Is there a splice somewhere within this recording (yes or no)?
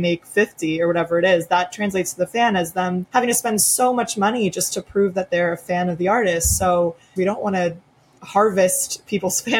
yes